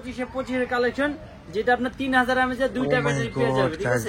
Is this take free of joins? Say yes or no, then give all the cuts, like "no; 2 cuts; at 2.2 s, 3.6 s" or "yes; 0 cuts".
yes; 0 cuts